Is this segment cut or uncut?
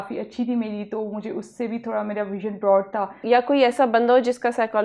cut